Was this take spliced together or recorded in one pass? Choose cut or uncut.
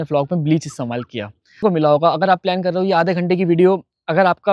cut